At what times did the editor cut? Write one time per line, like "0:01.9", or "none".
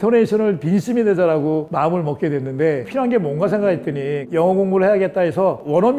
none